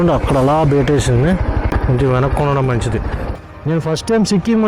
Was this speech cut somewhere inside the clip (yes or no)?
yes